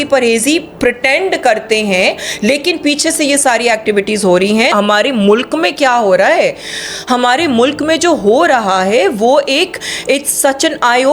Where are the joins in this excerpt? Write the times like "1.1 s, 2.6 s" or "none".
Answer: 4.7 s